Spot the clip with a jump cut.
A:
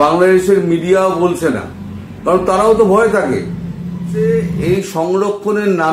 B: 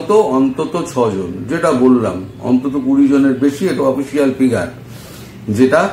A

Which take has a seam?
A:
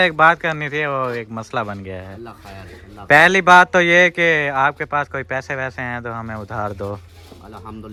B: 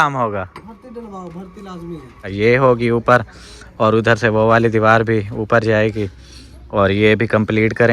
B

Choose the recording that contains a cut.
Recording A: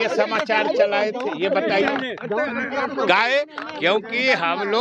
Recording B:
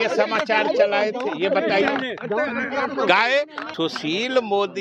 B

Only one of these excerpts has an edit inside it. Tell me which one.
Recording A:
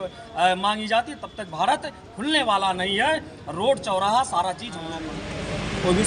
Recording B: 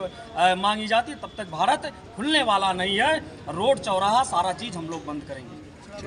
A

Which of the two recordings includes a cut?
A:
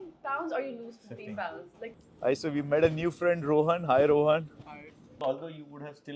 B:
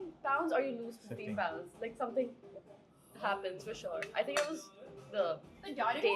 A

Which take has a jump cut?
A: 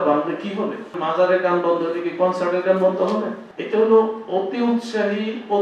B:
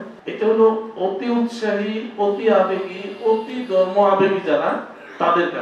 A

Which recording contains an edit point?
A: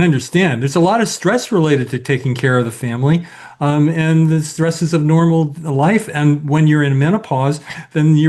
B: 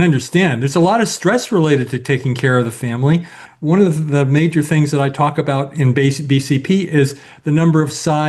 B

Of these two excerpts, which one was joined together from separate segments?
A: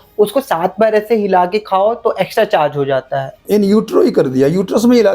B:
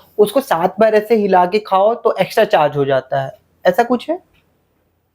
A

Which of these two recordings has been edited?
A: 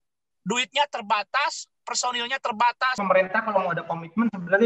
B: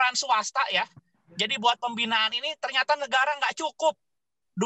A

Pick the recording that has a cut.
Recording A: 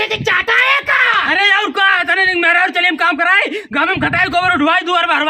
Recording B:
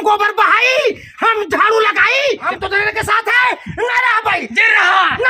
B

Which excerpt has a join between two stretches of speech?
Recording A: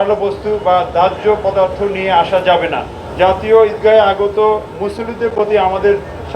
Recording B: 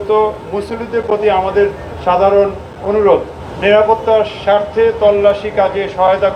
A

